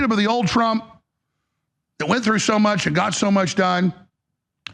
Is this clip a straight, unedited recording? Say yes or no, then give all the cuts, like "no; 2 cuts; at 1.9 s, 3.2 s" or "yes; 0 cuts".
yes; 0 cuts